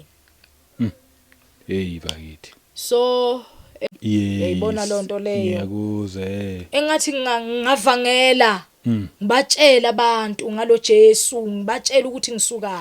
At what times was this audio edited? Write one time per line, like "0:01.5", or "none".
0:03.8